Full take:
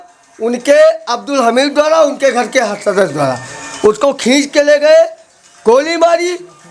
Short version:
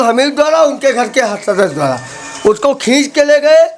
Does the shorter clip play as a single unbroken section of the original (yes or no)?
yes